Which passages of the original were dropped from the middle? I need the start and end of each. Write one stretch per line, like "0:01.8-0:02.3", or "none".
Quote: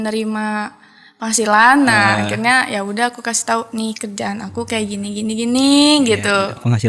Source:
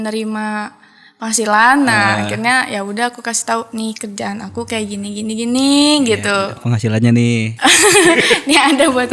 none